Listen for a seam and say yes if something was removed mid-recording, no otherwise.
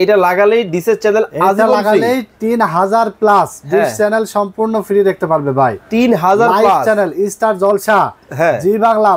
no